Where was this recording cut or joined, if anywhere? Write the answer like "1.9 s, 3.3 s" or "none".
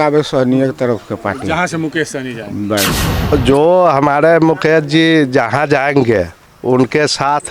3.1 s